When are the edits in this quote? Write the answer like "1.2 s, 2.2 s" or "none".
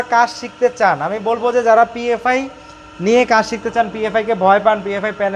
none